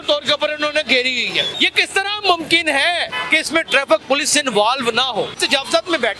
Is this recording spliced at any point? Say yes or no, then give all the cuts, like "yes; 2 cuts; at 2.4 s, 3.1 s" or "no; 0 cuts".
yes; 3 cuts; at 1.5 s, 3.1 s, 5.4 s